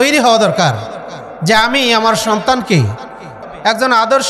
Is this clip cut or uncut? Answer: cut